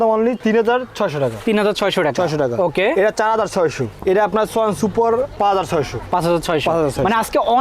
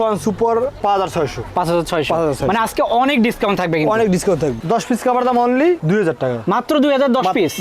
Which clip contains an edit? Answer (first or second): second